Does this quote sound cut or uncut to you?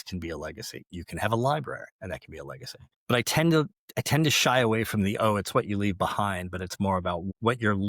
cut